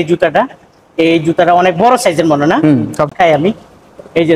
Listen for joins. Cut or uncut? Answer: cut